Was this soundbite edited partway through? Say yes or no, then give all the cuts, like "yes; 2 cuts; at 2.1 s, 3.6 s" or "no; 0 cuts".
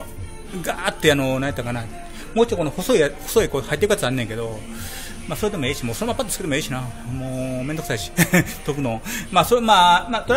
yes; 1 cut; at 7.1 s